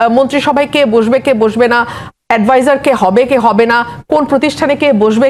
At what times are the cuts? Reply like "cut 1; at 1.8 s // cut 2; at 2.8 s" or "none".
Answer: none

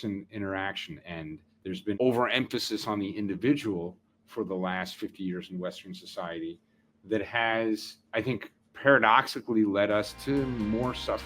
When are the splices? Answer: cut 1; at 1.3 s // cut 2; at 8.0 s

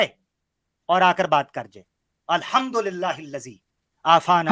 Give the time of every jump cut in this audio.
none

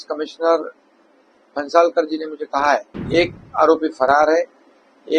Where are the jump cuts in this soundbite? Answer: cut 1; at 3.0 s

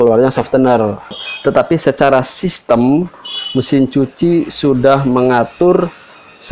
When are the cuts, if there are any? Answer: cut 1; at 1.3 s

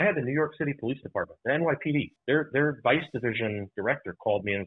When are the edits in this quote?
cut 1; at 2.1 s

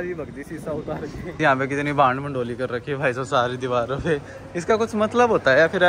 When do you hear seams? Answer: cut 1; at 1.3 s

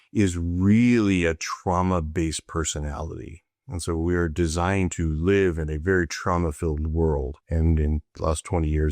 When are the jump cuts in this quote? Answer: cut 1; at 7.4 s

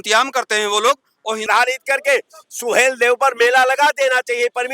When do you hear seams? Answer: cut 1; at 1.4 s

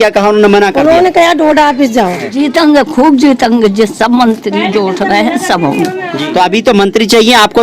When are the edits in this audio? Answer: cut 1; at 2.3 s // cut 2; at 6.1 s

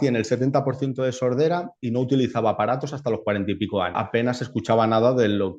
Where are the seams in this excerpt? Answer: cut 1; at 4.0 s

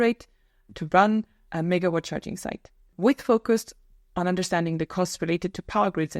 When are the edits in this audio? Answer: cut 1; at 2.9 s

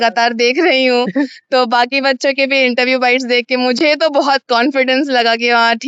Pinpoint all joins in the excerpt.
none

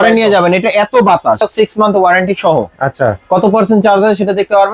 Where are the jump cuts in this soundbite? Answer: cut 1; at 1.4 s

